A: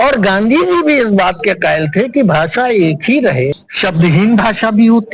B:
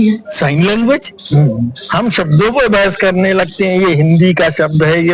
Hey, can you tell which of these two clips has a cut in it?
A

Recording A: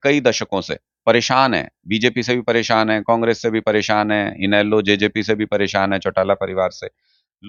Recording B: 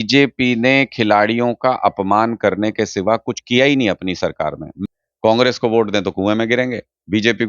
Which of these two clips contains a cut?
B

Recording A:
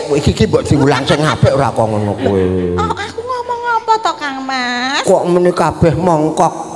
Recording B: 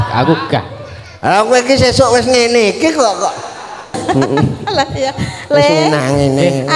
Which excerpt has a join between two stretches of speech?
B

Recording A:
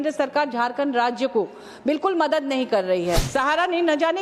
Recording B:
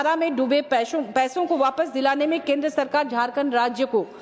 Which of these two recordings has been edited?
A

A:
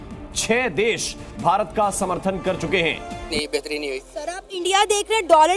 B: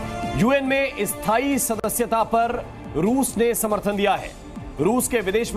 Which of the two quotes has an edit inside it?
A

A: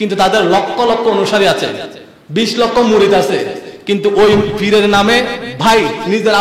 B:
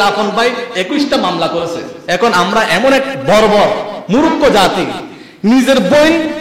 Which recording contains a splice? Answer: B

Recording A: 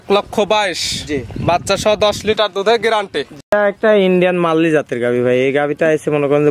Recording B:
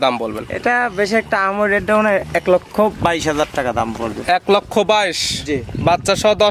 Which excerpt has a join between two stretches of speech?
A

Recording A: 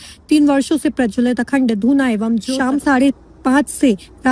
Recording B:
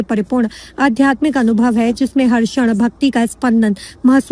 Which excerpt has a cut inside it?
A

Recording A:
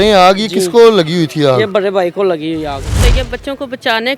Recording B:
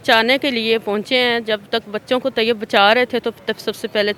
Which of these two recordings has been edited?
A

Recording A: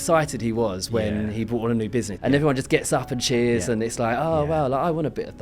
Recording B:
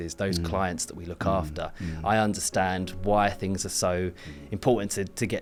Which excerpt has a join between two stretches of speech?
A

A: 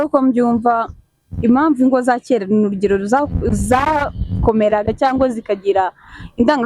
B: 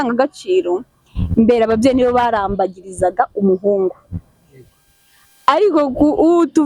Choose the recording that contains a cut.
A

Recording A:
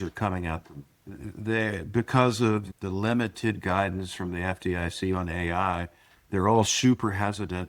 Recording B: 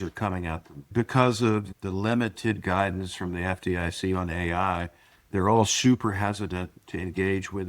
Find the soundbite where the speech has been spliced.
B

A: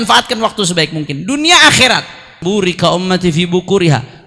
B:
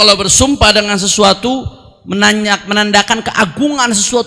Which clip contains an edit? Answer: A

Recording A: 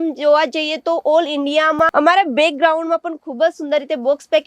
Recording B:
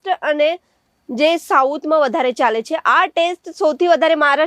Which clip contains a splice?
A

